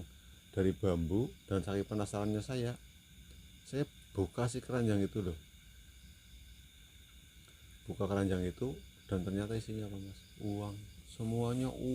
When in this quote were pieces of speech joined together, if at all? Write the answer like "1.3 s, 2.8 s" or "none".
1.4 s